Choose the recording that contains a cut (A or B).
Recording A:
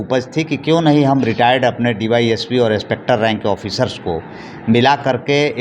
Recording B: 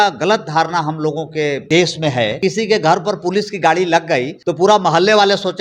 B